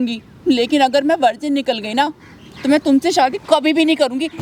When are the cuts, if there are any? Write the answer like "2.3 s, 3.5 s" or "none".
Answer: none